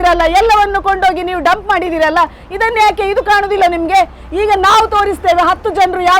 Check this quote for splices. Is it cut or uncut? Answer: uncut